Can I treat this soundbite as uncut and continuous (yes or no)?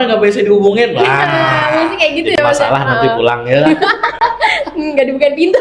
yes